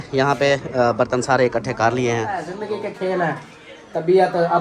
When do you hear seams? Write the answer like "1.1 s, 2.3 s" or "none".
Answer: 2.5 s